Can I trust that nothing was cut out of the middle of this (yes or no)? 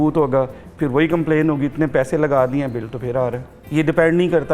no